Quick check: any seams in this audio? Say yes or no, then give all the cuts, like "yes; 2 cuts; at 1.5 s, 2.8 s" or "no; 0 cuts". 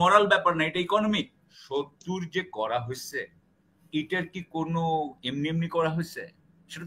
yes; 1 cut; at 1.6 s